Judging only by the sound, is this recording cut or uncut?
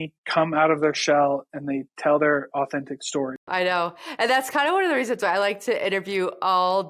cut